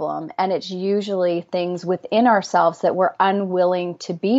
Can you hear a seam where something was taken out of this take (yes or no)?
no